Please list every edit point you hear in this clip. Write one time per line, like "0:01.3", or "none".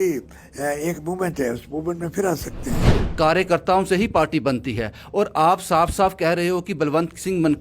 0:02.9